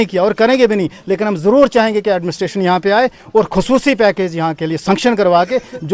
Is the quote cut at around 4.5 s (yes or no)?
no